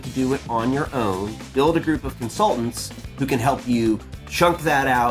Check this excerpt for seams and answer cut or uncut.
cut